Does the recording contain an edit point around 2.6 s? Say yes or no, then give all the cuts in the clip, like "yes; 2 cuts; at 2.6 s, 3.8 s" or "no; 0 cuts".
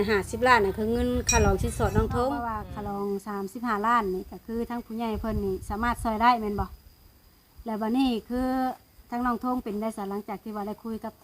yes; 1 cut; at 2.6 s